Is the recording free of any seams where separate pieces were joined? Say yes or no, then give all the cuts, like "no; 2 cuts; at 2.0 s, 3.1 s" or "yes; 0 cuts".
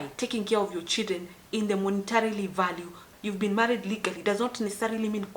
no; 1 cut; at 3.0 s